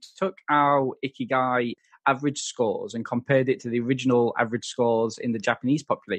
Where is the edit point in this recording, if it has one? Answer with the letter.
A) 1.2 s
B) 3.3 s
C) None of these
C